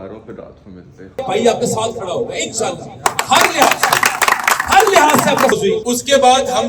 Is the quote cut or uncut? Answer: cut